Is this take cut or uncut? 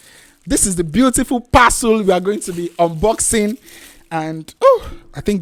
uncut